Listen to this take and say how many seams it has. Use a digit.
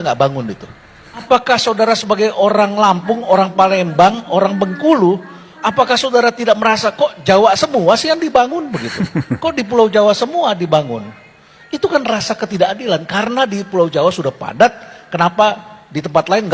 1